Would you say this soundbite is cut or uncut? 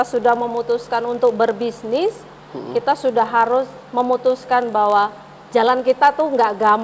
uncut